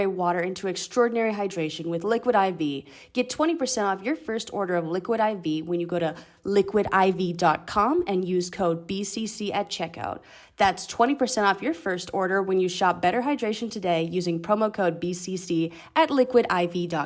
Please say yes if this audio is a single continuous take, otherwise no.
yes